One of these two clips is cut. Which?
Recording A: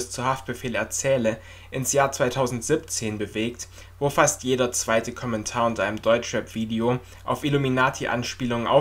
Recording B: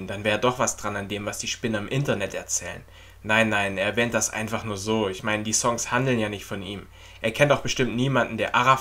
A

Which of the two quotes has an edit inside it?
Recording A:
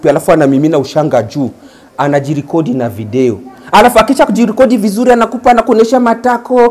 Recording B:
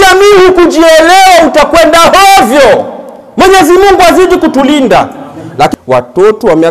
B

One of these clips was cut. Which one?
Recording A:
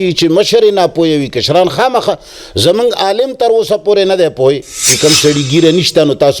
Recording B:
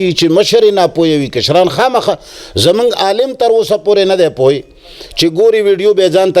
A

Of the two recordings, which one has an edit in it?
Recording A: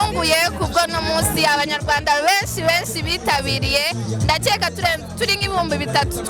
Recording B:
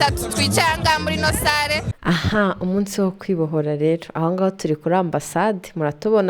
B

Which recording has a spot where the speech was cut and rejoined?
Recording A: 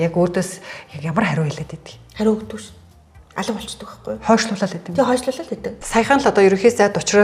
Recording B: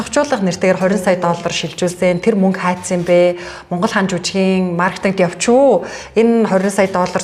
A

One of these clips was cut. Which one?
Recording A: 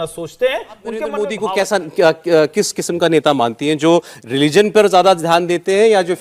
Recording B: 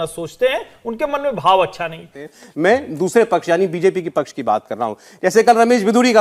A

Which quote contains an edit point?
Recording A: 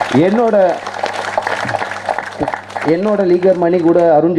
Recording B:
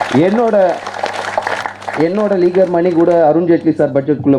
B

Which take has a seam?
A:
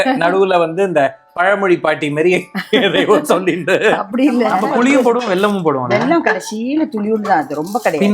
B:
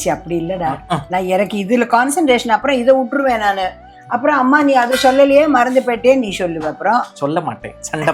A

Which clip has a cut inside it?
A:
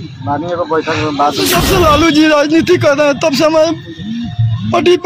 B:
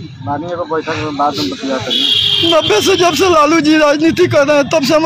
A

